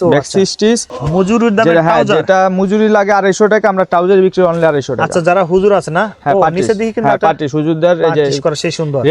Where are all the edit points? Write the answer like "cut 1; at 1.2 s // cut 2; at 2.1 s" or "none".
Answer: cut 1; at 1.0 s